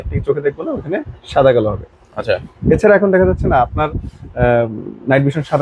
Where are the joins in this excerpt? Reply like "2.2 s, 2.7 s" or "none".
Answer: none